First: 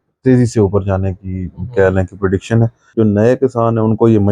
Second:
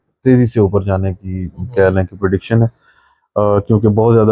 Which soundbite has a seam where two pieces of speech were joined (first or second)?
first